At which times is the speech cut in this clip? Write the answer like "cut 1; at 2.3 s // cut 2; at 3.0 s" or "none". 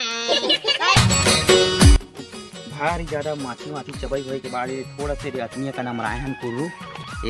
cut 1; at 1.0 s